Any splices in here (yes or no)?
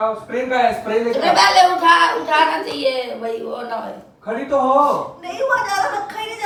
no